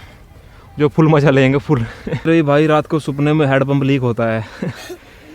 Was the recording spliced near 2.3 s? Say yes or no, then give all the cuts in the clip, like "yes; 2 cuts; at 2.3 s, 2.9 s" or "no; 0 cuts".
yes; 1 cut; at 2.3 s